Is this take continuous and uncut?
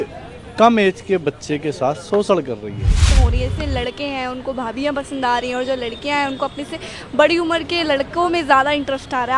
no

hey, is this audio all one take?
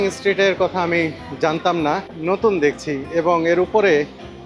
no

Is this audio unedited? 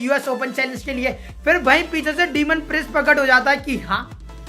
no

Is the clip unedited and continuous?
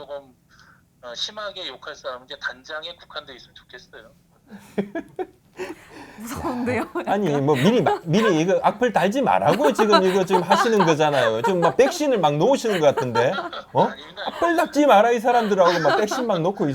yes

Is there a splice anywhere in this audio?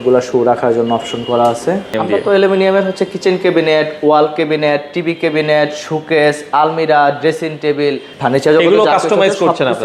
yes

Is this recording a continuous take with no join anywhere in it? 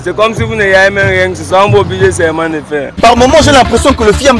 yes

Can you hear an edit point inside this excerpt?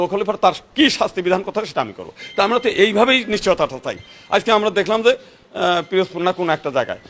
no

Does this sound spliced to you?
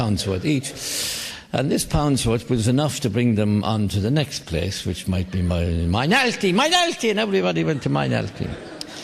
yes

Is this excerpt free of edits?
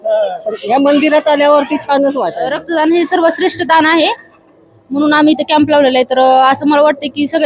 no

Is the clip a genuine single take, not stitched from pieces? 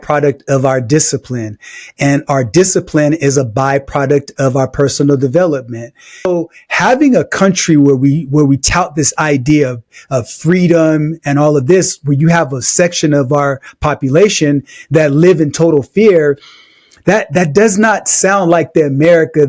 no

